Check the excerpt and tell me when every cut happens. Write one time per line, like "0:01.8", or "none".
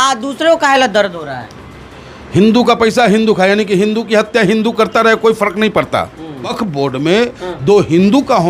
0:06.5